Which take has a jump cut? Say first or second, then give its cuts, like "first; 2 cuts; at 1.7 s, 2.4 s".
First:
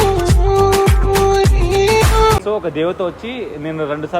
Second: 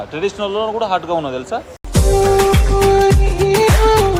first; 1 cut; at 2.4 s